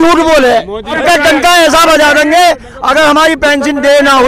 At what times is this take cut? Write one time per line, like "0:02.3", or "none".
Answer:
0:01.0